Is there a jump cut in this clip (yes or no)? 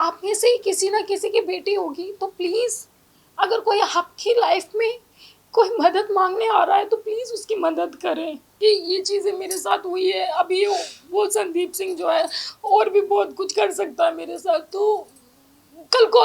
yes